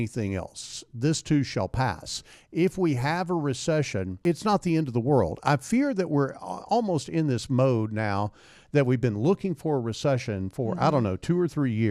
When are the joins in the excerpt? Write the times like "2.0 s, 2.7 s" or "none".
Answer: 4.2 s